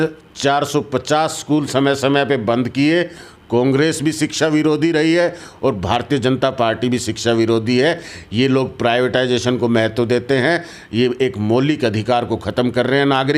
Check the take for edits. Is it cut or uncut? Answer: uncut